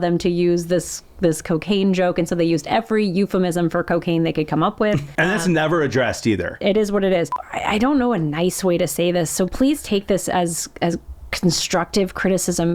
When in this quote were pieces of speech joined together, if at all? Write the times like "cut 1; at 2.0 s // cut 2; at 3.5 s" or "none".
cut 1; at 5.1 s // cut 2; at 6.6 s // cut 3; at 7.3 s